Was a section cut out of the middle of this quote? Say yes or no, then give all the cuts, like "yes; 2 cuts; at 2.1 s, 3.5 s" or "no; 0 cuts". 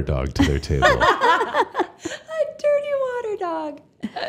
no; 0 cuts